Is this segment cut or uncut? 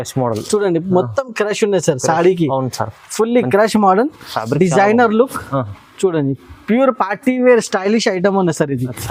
uncut